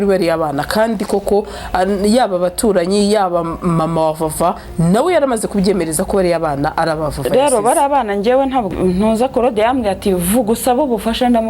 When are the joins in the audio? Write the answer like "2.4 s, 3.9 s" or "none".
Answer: 8.7 s